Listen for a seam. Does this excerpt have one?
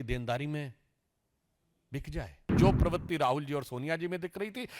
yes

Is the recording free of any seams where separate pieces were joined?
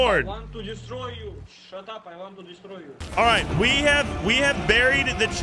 no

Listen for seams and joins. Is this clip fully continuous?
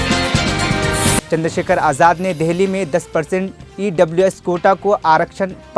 yes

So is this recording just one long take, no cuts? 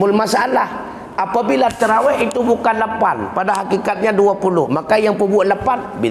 yes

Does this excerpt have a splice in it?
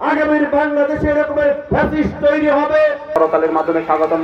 yes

